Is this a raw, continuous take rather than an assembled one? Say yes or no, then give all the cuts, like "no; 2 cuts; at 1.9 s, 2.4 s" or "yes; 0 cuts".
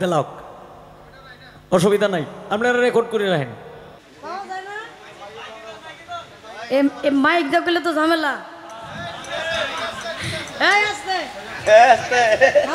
no; 1 cut; at 4.0 s